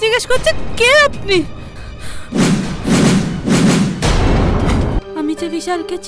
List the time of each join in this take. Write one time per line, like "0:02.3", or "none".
0:05.0